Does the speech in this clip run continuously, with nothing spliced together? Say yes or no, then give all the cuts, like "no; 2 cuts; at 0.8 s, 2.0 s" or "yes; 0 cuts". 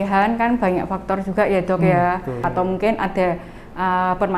no; 1 cut; at 2.4 s